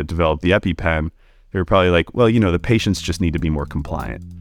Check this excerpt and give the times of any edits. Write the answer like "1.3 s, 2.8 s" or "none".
none